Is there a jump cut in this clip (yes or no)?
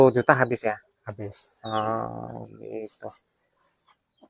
no